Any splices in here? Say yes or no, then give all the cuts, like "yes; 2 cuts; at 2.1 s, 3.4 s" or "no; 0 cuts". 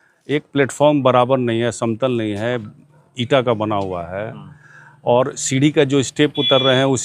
no; 0 cuts